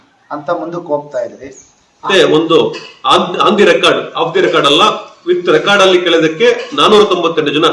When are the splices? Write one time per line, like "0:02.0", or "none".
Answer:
0:02.0